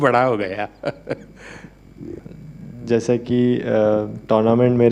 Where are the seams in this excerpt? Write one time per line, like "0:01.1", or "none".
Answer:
none